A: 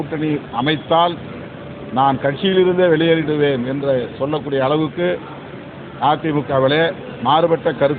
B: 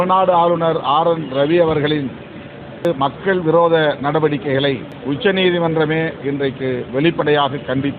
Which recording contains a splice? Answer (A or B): B